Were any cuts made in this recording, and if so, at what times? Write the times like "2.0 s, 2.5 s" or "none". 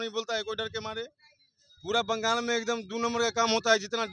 none